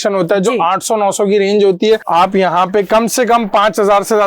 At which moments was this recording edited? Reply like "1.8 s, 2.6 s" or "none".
2.0 s